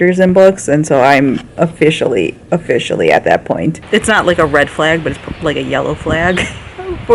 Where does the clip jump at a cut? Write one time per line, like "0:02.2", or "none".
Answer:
0:03.8